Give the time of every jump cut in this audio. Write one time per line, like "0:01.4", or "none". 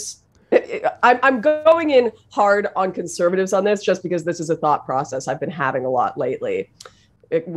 none